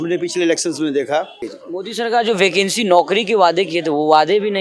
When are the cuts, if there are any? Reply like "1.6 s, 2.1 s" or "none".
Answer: 1.4 s